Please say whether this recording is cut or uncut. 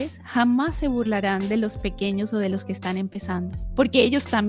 uncut